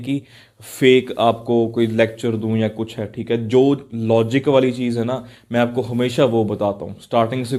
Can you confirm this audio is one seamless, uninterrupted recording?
yes; 0 cuts

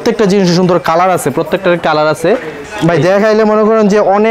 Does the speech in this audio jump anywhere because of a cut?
yes; 1 cut; at 2.6 s

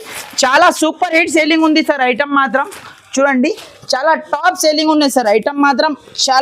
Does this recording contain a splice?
no; 0 cuts

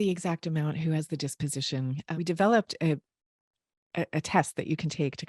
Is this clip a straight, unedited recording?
no; 1 cut; at 2.0 s

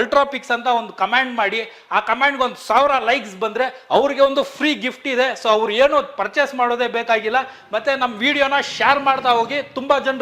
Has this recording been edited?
no; 0 cuts

